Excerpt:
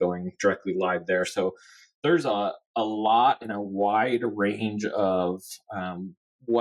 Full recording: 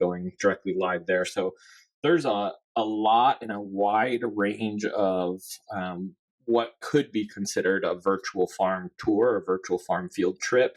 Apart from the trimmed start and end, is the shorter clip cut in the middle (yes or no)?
no